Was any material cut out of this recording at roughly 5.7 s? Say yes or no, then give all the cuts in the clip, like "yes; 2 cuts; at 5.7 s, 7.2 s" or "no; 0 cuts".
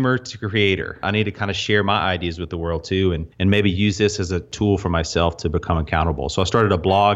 no; 3 cuts; at 1.0 s, 3.3 s, 4.5 s